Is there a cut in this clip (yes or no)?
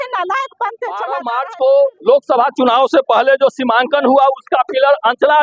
yes